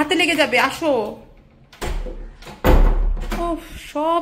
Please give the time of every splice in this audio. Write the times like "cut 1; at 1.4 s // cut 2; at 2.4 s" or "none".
none